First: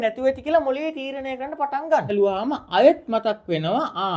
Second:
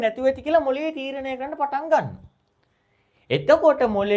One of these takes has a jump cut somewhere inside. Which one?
first; 1 cut; at 2.1 s

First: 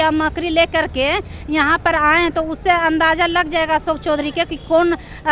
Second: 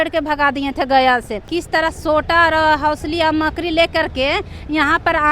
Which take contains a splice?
second; 1 cut; at 1.5 s

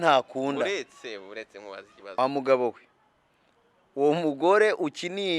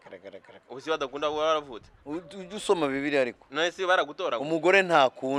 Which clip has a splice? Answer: first; 1 cut; at 2.0 s

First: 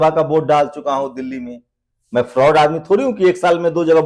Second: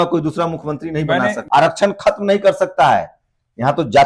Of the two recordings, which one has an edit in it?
second; 1 cut; at 1.4 s

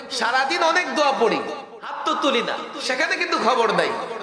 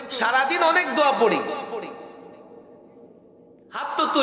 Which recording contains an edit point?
first; 1 cut; at 1.7 s

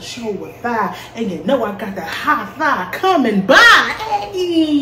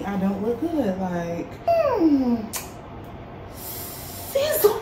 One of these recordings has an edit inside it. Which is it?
second; 1 cut; at 1.7 s

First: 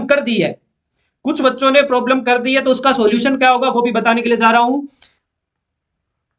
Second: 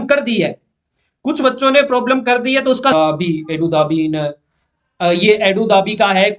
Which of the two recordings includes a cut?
second; 1 cut; at 2.9 s

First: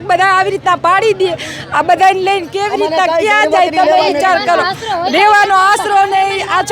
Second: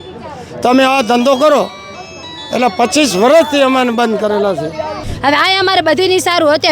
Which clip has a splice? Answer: second; 1 cut; at 5.1 s

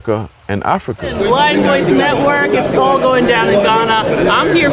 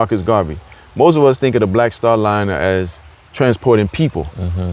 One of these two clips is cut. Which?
first; 1 cut; at 1.1 s

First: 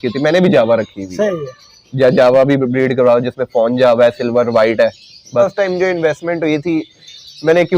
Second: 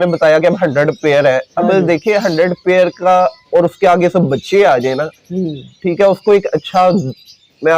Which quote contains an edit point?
first; 1 cut; at 5.4 s

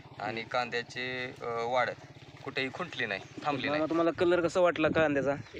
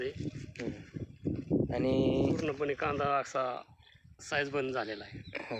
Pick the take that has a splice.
first; 1 cut; at 3.6 s

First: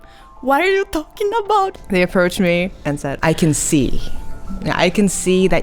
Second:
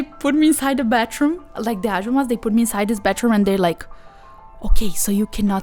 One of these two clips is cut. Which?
first; 2 cuts; at 1.7 s, 3.2 s

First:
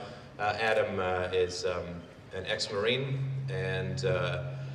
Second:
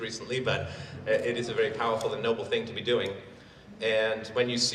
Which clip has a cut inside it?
first; 1 cut; at 1.5 s

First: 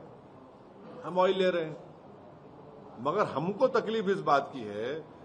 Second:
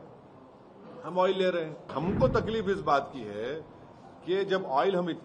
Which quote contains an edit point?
second; 1 cut; at 1.9 s

